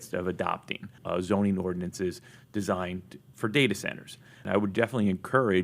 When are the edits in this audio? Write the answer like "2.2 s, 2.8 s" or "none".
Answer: 0.9 s, 4.4 s